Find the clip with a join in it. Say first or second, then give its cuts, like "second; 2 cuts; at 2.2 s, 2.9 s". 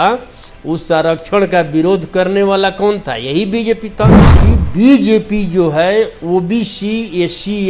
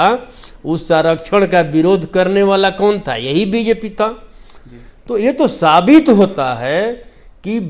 first; 1 cut; at 4.3 s